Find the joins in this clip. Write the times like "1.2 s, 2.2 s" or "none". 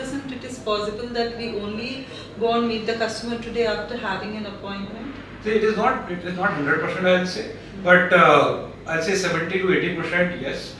none